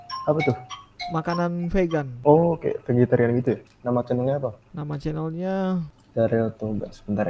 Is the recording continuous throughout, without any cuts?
no; 4 cuts; at 2.1 s, 3.6 s, 4.7 s, 6.0 s

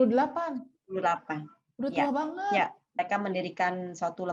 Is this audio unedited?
no; 1 cut; at 3.0 s

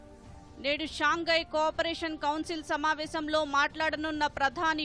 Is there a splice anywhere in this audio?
no; 0 cuts

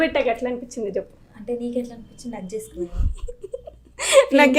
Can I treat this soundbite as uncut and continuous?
yes; 0 cuts

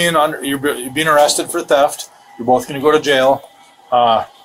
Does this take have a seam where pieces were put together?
no; 0 cuts

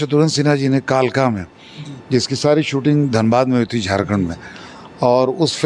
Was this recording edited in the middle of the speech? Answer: no; 0 cuts

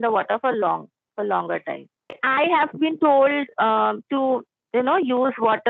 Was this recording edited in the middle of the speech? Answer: yes; 1 cut; at 2.2 s

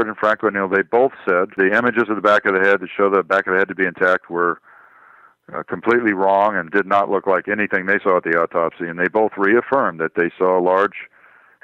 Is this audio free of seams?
no; 1 cut; at 1.5 s

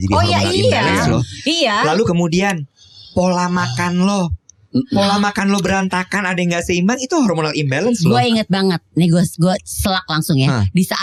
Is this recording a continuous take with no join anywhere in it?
yes; 0 cuts

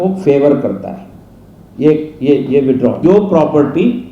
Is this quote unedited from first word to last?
no; 1 cut; at 3.0 s

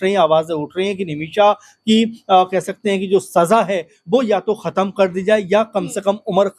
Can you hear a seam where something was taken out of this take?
no; 0 cuts

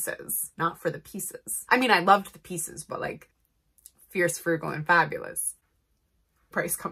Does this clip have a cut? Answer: no; 0 cuts

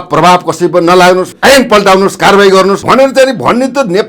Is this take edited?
yes; 2 cuts; at 1.3 s, 2.8 s

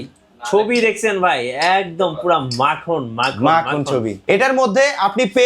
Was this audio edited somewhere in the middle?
yes; 1 cut; at 4.2 s

